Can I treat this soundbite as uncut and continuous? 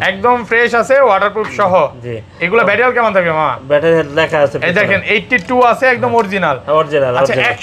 yes; 0 cuts

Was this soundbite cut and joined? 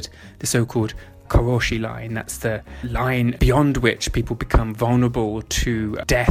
yes; 2 cuts; at 1.1 s, 3.2 s

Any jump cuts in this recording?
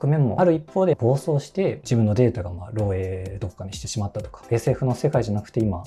yes; 2 cuts; at 0.9 s, 4.4 s

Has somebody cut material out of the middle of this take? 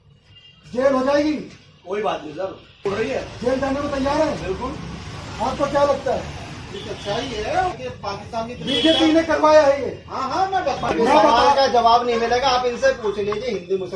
yes; 3 cuts; at 2.8 s, 7.8 s, 10.9 s

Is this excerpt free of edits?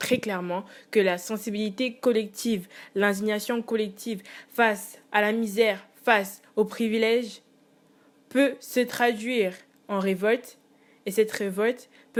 yes; 0 cuts

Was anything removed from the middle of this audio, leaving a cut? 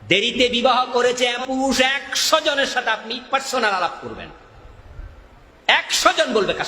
yes; 1 cut; at 1.4 s

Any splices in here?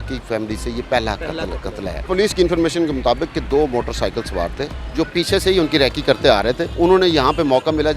yes; 2 cuts; at 2.1 s, 6.7 s

